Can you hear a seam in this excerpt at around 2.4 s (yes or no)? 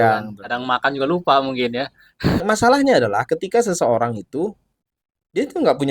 yes